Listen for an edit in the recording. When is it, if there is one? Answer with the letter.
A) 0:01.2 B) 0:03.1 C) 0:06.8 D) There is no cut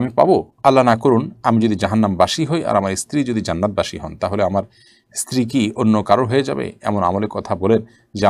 D